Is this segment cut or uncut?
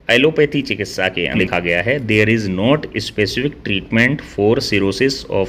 cut